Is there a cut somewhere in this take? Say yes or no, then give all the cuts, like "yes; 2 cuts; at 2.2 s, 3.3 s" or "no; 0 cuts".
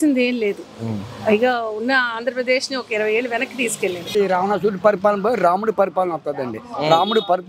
yes; 1 cut; at 4.1 s